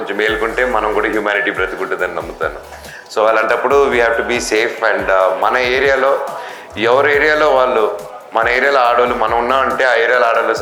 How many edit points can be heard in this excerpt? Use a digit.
0